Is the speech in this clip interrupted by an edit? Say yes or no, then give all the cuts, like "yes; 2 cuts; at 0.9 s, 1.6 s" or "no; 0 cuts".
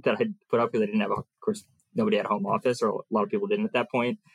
no; 0 cuts